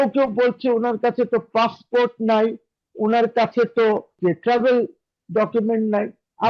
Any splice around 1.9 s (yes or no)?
no